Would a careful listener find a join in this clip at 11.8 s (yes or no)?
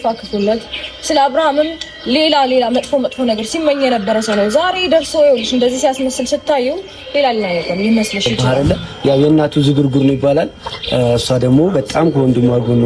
no